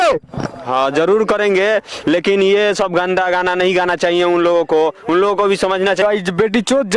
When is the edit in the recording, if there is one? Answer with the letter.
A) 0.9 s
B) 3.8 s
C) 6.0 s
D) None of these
C